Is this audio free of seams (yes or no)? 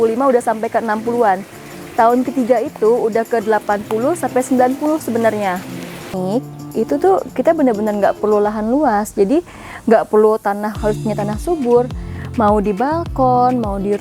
no